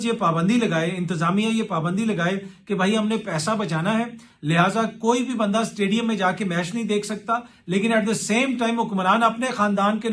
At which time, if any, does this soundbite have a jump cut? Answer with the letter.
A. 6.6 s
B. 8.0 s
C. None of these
C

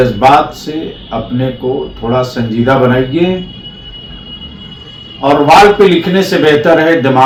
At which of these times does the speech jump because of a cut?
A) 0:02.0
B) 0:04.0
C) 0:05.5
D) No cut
D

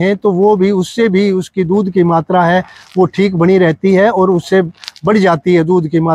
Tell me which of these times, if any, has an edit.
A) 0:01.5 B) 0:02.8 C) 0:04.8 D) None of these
D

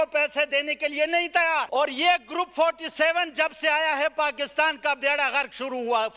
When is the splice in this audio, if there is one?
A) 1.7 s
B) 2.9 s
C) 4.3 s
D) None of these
A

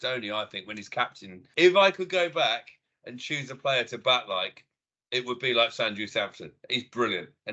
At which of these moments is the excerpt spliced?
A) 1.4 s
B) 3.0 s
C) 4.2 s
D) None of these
A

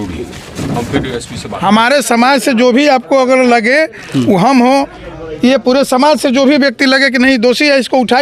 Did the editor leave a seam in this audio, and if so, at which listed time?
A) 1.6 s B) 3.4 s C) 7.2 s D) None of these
A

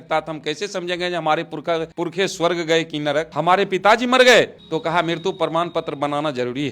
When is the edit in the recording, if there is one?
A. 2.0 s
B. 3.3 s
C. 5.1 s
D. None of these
B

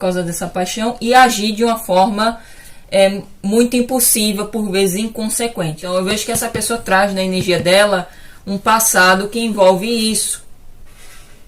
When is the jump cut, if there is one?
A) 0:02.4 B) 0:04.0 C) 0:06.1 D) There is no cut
C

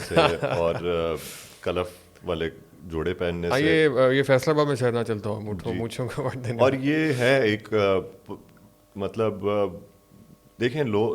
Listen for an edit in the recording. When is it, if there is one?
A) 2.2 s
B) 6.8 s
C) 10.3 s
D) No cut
D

